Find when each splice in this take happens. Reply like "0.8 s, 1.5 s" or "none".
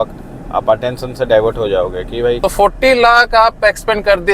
2.4 s